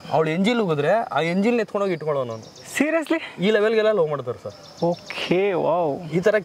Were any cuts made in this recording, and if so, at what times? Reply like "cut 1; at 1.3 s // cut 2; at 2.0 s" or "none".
none